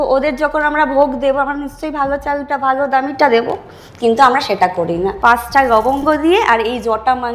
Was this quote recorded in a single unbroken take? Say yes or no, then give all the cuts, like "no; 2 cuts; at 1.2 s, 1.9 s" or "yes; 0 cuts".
no; 1 cut; at 5.2 s